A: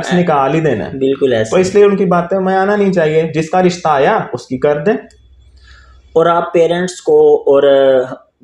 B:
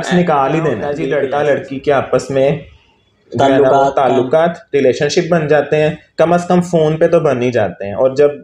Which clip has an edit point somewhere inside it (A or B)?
B